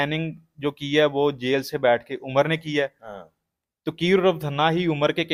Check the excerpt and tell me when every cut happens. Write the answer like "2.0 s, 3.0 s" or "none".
none

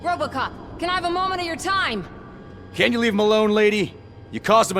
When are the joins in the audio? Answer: none

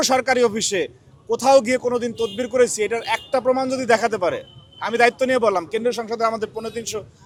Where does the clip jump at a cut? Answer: none

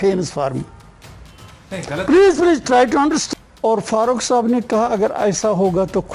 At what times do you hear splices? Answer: 3.2 s

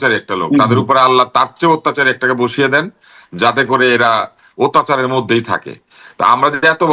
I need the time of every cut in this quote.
none

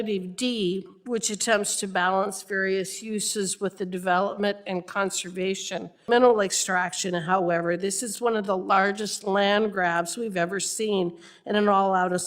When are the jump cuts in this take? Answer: 6.1 s

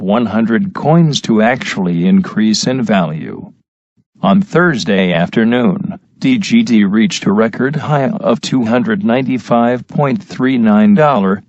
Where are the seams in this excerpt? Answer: 7.8 s

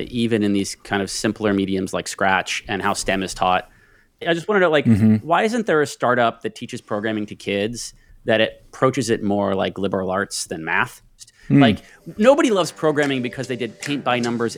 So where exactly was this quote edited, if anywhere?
4.1 s, 11.3 s

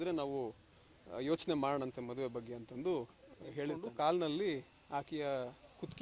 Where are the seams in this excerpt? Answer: 3.8 s

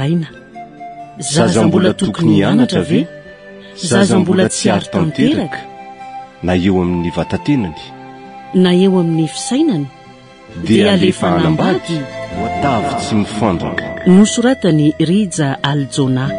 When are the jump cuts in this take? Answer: 12.6 s

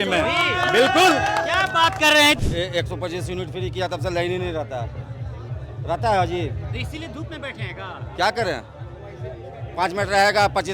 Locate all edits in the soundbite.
2.4 s

